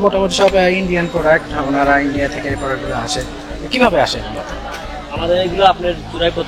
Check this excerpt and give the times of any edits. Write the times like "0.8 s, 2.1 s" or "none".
none